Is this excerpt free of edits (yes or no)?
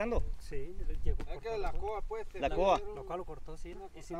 yes